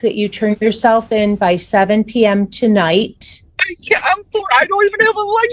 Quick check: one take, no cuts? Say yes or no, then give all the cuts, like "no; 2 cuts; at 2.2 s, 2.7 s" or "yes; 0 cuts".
yes; 0 cuts